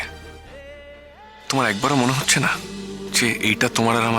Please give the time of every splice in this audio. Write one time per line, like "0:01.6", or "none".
0:01.5
0:03.0